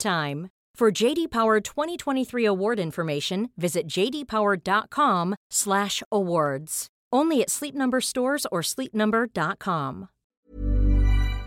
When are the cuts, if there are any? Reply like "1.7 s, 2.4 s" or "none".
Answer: 10.2 s